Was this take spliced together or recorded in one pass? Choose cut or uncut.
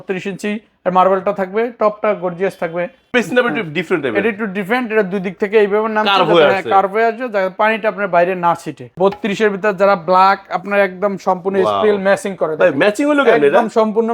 cut